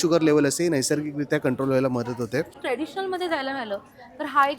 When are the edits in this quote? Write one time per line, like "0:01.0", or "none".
0:02.6